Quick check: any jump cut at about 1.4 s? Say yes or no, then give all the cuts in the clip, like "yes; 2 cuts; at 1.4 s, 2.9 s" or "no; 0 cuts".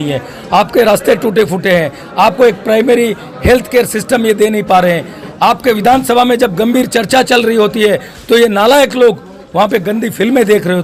no; 0 cuts